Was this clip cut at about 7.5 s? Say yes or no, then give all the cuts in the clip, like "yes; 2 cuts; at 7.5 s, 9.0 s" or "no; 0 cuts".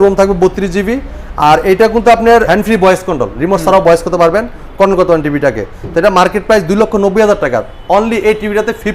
no; 1 cut; at 2.5 s